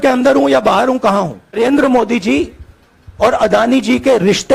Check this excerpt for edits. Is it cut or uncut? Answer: cut